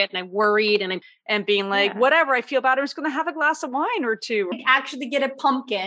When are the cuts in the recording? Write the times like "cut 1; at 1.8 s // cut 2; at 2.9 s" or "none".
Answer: cut 1; at 1.1 s // cut 2; at 4.5 s